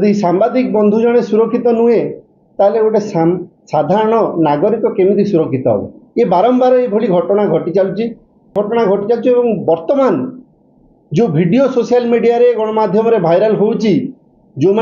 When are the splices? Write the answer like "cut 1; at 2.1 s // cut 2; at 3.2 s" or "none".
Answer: cut 1; at 8.5 s